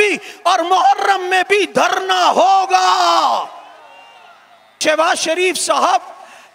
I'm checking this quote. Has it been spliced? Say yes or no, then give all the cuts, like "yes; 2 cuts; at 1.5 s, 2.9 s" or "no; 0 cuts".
yes; 1 cut; at 4.8 s